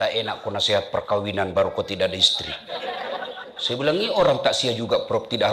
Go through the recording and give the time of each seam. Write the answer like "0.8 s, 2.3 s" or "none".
none

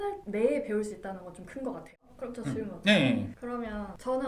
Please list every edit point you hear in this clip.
1.9 s

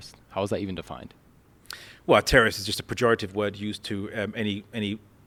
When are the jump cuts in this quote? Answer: none

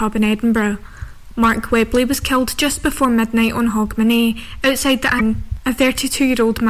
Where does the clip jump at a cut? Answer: 5.2 s

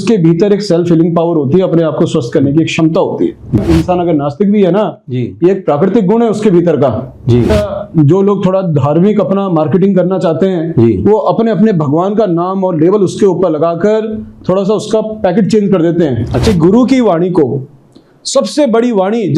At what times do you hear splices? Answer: 3.6 s, 7.5 s, 16.5 s

